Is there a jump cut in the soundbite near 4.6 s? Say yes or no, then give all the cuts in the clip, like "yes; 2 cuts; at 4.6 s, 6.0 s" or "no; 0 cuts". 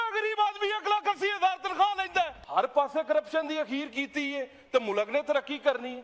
no; 1 cut; at 2.4 s